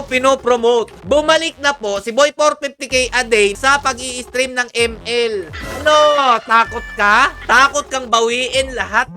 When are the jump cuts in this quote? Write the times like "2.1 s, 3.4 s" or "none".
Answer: 1.0 s, 3.6 s, 5.6 s, 7.4 s